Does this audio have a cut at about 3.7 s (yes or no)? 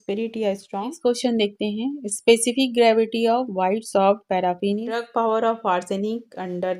no